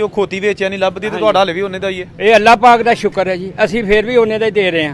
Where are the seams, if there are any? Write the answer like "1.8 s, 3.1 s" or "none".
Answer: none